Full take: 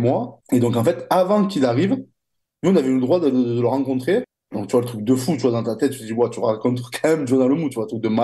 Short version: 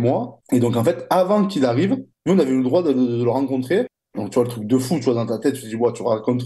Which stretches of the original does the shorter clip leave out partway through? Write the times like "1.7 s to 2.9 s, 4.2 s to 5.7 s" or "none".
2.1 s to 2.5 s